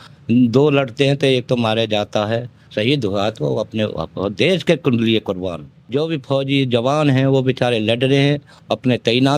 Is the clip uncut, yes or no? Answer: no